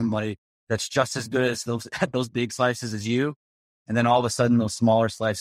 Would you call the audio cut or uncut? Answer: uncut